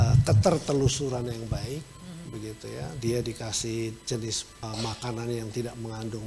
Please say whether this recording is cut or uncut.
cut